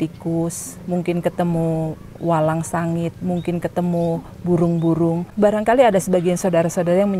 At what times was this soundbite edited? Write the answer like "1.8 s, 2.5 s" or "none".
5.3 s